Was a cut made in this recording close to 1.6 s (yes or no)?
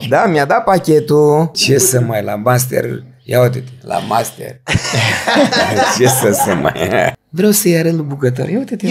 yes